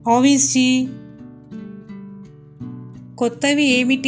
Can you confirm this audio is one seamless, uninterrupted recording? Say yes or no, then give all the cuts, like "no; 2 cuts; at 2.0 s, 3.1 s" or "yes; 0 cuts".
no; 2 cuts; at 1.2 s, 3.1 s